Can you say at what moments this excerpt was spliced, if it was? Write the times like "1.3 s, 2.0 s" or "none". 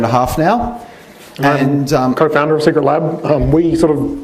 2.6 s

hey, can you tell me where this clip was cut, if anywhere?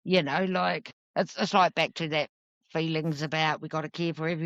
0.9 s

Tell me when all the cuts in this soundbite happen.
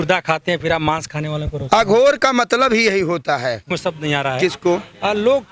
3.7 s

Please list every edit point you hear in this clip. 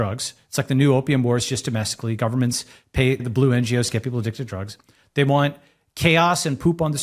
3.2 s

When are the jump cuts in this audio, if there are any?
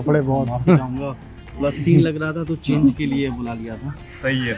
none

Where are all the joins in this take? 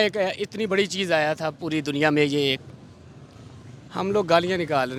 none

